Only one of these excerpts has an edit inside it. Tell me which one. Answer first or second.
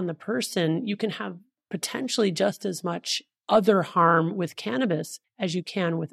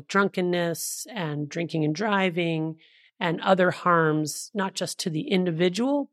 first